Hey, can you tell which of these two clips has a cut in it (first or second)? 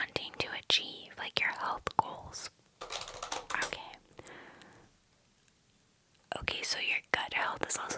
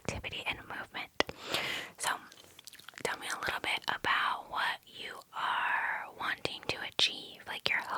first